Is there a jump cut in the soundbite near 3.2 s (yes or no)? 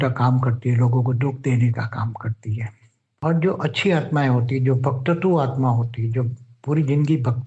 yes